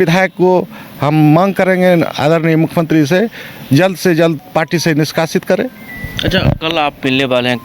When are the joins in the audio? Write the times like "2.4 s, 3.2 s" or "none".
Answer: none

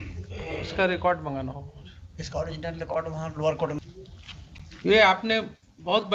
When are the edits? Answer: 3.8 s

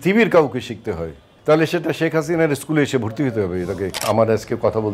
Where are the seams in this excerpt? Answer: 1.3 s, 4.0 s

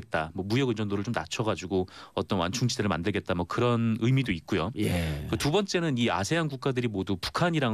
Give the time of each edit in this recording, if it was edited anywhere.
none

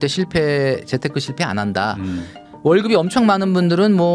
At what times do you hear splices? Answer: 2.3 s

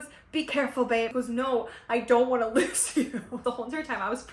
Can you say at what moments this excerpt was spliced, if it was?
1.1 s, 3.4 s

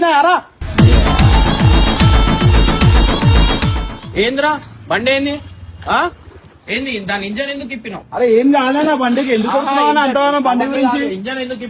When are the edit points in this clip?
3.8 s

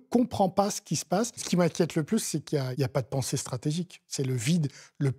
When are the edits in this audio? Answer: 1.4 s, 2.7 s, 4.0 s

